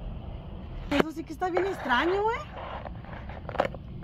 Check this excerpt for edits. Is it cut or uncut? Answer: cut